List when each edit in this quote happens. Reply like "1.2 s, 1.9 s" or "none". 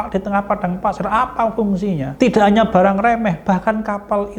2.1 s